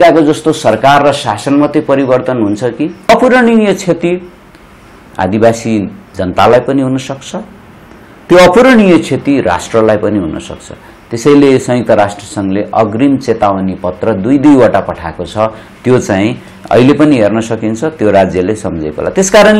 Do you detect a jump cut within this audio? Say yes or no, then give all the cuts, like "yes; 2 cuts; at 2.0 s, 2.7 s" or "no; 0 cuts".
yes; 1 cut; at 3.1 s